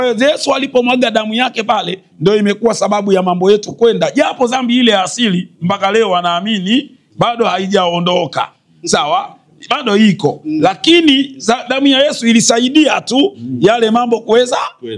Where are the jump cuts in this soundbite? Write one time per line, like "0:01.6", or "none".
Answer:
none

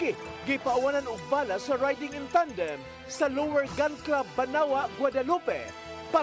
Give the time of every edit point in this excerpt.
none

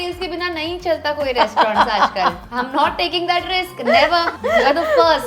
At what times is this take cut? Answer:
0:02.4
0:04.3

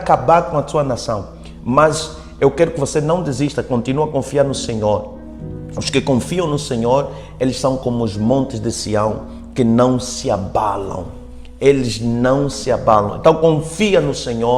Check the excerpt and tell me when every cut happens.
none

